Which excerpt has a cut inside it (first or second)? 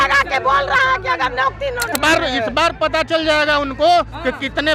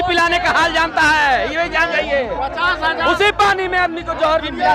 first